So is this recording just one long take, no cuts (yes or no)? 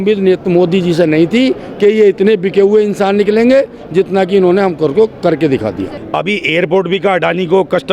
no